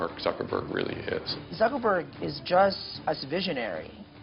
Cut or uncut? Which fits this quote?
cut